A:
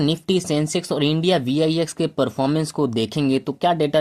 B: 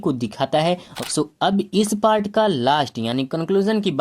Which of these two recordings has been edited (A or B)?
B